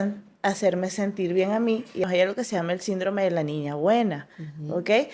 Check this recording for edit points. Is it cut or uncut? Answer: cut